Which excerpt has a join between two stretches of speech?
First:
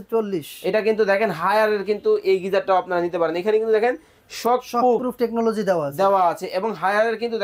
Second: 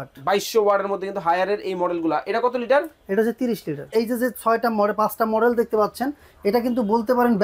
second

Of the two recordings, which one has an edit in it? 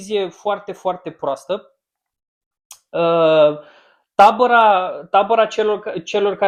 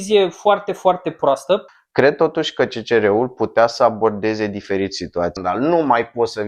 second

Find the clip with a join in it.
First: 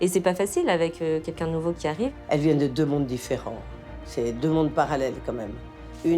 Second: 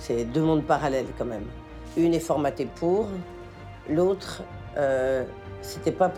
first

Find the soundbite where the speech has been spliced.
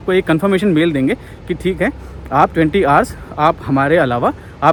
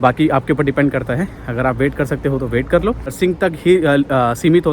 second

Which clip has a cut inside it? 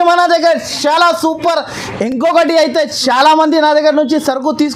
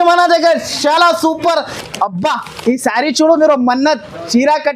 second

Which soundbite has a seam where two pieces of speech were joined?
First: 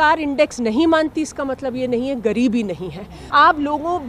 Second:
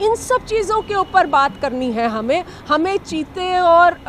first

